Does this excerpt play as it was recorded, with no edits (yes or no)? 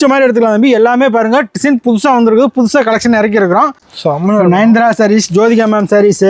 no